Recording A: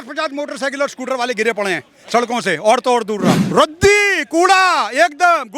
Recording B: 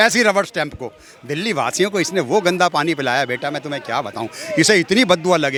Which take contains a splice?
A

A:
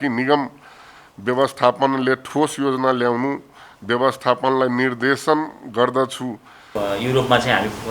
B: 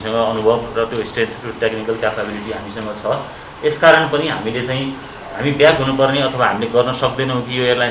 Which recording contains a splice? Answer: A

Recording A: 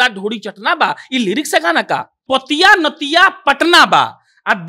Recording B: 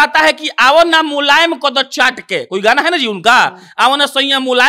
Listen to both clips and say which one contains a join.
A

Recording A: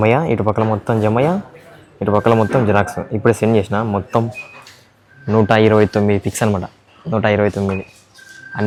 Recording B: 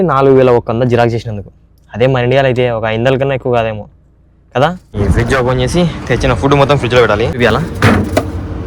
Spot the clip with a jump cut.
B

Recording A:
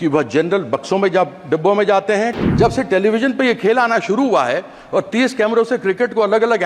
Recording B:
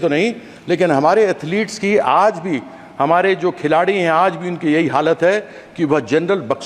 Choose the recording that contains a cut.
A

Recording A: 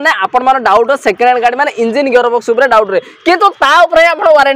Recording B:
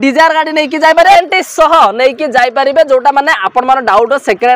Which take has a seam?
B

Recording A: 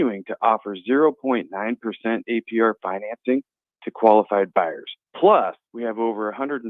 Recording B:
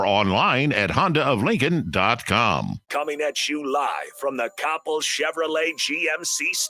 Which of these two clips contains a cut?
B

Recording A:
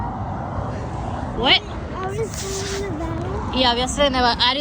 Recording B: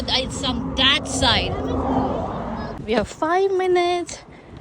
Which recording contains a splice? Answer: B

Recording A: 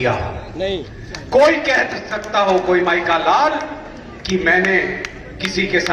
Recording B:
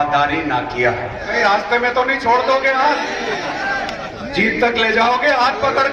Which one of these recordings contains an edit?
B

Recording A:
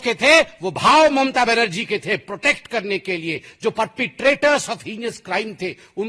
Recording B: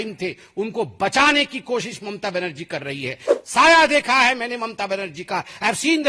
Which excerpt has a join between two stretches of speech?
B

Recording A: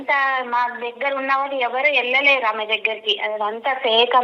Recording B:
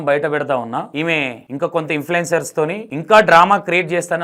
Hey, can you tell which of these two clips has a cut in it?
B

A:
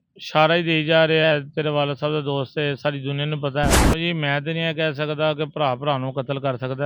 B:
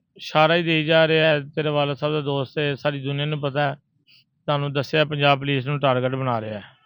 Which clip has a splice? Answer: A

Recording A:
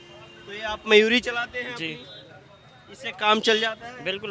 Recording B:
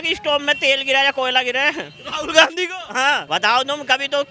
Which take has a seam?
B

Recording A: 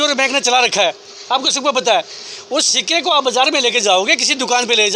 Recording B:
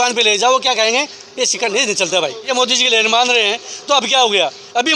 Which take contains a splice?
B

